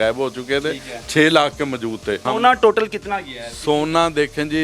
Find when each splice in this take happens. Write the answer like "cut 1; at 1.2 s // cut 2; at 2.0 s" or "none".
cut 1; at 2.2 s